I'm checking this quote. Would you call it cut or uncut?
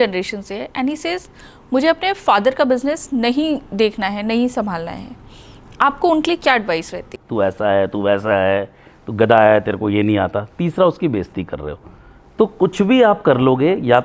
cut